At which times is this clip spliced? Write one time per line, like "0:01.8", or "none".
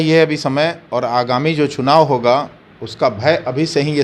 none